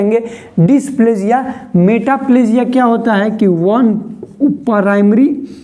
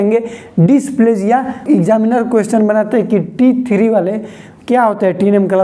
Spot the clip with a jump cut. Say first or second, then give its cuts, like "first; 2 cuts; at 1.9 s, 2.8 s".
second; 1 cut; at 1.6 s